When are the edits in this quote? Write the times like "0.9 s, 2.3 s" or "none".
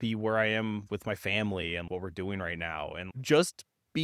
0.9 s, 1.9 s